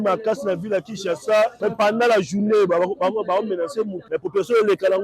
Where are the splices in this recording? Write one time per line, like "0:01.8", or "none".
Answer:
0:01.6
0:04.0